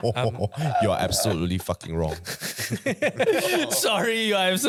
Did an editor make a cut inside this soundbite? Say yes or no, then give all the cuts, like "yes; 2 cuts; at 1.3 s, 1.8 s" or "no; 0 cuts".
no; 0 cuts